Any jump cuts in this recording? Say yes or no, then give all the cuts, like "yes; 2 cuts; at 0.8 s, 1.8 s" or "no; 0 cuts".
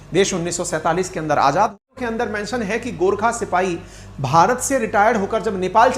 yes; 1 cut; at 1.9 s